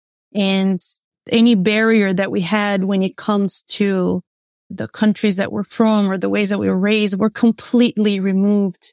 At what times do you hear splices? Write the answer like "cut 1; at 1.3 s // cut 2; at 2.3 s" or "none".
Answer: cut 1; at 1.2 s // cut 2; at 4.8 s